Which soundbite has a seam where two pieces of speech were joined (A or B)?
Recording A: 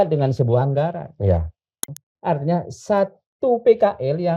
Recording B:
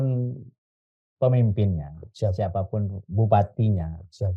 A